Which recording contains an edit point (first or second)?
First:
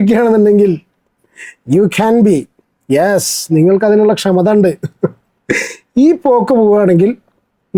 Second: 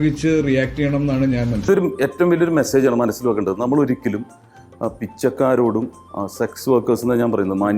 second